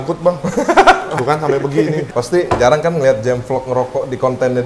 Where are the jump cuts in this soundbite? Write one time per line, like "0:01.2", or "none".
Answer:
0:01.1
0:02.1